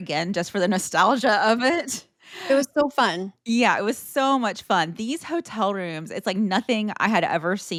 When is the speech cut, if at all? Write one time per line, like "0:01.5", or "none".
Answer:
none